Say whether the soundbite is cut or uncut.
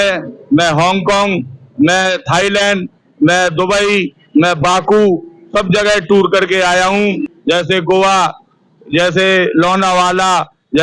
cut